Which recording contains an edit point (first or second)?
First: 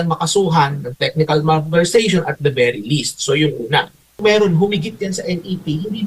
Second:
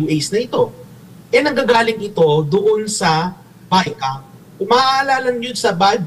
first